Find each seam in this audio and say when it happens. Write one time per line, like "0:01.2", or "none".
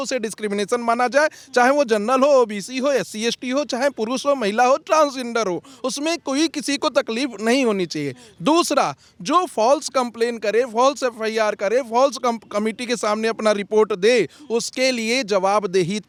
none